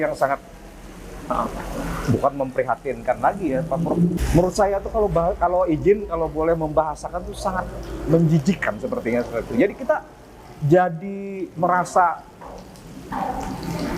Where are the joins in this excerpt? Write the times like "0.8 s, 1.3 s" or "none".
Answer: 4.1 s